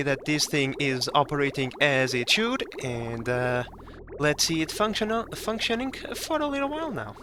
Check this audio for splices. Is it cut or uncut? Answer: uncut